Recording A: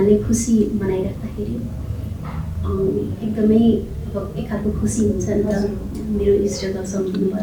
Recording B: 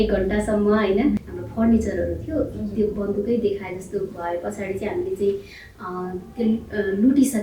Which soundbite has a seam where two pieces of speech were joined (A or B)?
B